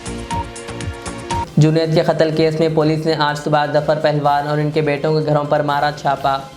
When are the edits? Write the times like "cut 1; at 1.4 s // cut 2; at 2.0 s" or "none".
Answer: cut 1; at 1.4 s